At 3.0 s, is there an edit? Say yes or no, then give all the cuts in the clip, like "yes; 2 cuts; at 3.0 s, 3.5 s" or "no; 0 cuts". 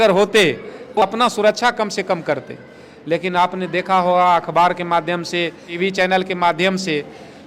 no; 2 cuts; at 1.0 s, 5.7 s